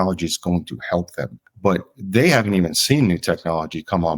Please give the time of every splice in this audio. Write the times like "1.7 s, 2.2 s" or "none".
1.4 s